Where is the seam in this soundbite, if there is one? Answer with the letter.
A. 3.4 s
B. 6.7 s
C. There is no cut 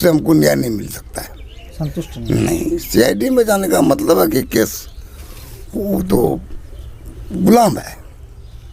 C